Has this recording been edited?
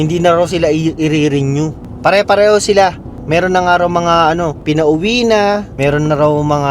yes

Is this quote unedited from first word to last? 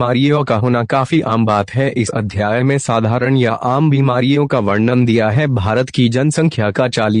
no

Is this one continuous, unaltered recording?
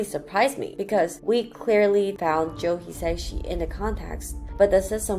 yes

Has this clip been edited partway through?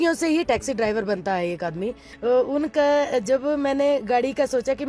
yes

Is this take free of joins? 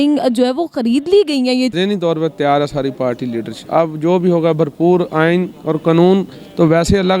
no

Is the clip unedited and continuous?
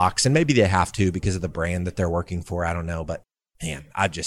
yes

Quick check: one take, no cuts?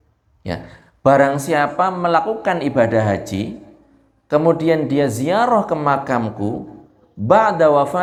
yes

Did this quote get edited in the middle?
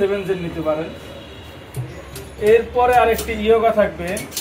no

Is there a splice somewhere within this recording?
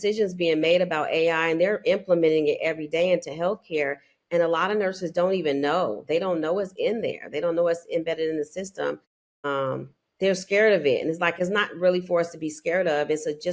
no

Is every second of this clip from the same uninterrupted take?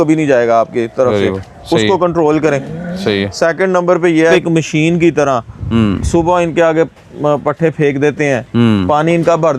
no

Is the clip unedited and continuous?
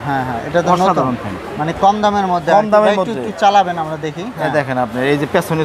yes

